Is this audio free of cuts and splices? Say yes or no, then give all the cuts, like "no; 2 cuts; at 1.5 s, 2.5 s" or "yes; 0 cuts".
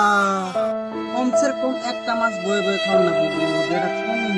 yes; 0 cuts